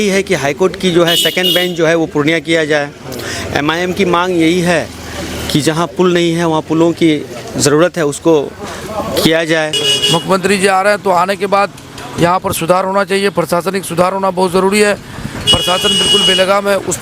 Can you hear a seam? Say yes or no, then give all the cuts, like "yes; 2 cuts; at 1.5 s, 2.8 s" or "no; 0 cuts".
yes; 1 cut; at 9.8 s